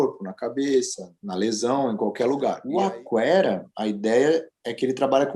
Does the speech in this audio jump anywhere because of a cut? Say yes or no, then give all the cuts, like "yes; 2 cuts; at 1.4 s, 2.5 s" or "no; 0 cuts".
yes; 1 cut; at 2.6 s